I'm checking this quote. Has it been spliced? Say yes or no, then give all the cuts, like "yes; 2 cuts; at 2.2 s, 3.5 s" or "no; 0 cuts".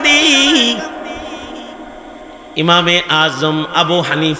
no; 0 cuts